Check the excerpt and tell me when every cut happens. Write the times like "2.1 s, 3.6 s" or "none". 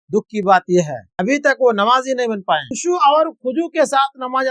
1.0 s, 2.7 s

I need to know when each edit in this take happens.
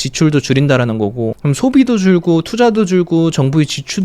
1.4 s

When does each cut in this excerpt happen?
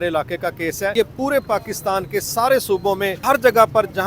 0.9 s, 3.2 s

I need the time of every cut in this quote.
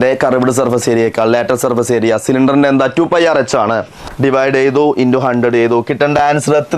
4.0 s

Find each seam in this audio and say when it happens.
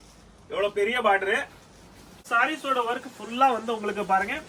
2.3 s

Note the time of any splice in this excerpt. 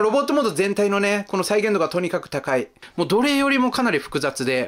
2.8 s

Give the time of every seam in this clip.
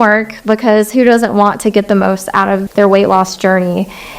2.7 s

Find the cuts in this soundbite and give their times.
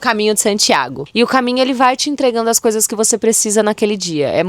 1.0 s

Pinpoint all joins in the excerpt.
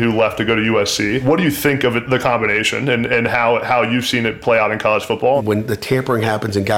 1.2 s, 5.4 s

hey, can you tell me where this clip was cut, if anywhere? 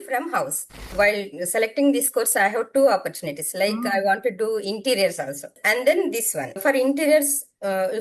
0.9 s, 5.5 s, 6.6 s

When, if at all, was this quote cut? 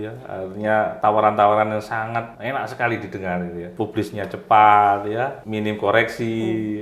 0.9 s, 2.3 s, 3.7 s, 5.4 s

